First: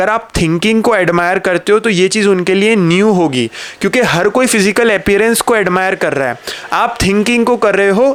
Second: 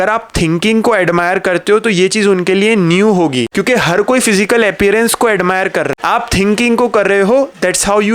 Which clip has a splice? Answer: second; 2 cuts; at 3.5 s, 5.9 s

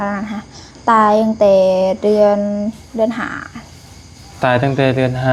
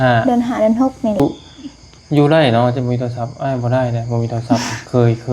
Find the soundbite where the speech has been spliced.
second; 1 cut; at 1.2 s

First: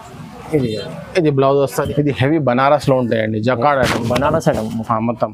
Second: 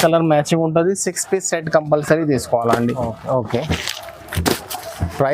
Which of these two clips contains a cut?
first; 1 cut; at 1.9 s

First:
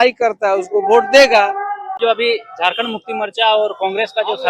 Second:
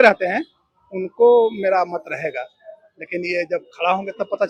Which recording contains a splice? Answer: first; 1 cut; at 2.0 s

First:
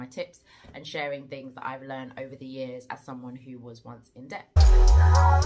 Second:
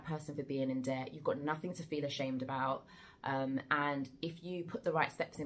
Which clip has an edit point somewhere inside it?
first; 1 cut; at 4.5 s

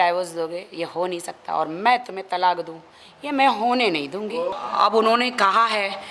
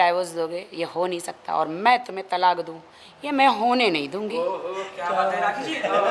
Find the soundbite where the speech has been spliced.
first; 1 cut; at 4.6 s

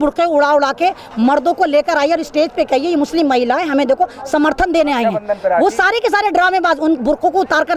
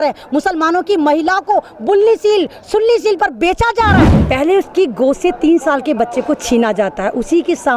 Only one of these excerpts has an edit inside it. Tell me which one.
second; 1 cut; at 4.1 s

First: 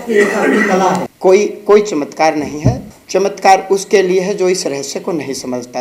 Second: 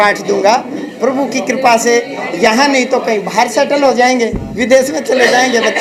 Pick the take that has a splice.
first; 1 cut; at 1.1 s

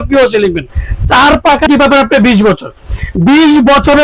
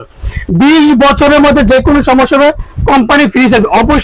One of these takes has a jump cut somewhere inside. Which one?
first; 1 cut; at 1.7 s

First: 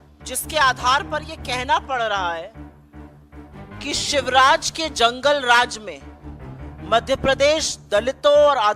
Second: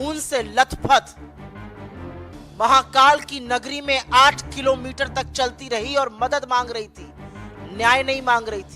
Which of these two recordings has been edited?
second; 2 cuts; at 1.0 s, 2.5 s

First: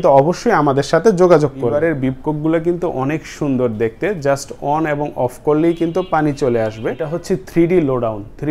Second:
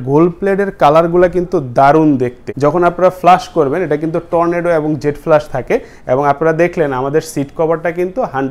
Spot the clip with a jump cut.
first; 2 cuts; at 1.7 s, 7.1 s

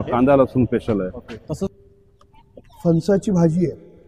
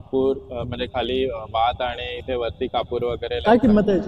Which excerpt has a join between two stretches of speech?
first; 1 cut; at 1.7 s

